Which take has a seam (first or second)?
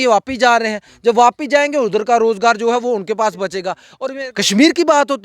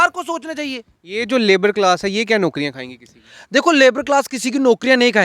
first